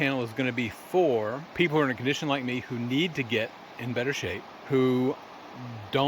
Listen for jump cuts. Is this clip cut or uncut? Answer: cut